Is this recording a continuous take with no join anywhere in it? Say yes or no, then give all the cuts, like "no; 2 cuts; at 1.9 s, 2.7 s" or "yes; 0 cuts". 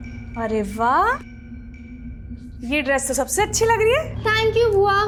yes; 0 cuts